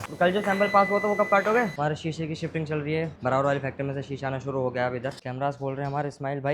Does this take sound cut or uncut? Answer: cut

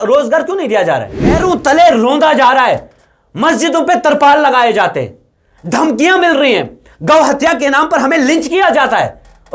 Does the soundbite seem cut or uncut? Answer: cut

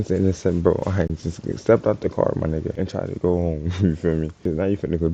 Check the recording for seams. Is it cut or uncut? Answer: cut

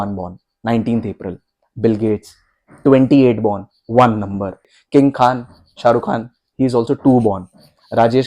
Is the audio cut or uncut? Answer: cut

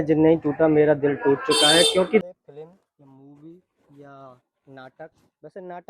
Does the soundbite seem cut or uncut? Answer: cut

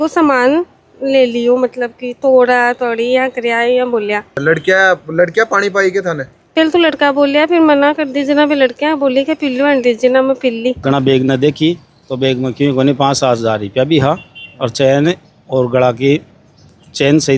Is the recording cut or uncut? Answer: cut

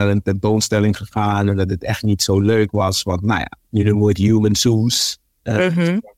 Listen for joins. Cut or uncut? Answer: cut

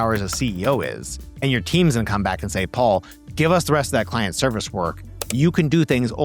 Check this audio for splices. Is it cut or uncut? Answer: uncut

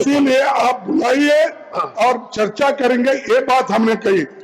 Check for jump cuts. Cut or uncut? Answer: uncut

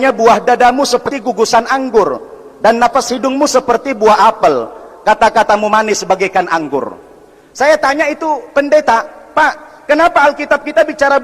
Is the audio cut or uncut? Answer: cut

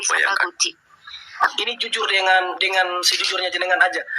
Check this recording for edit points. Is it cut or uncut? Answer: cut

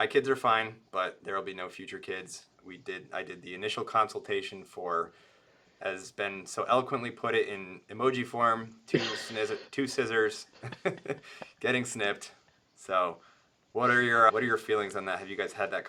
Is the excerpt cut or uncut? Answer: uncut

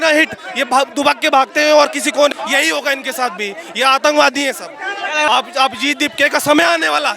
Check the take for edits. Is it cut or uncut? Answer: cut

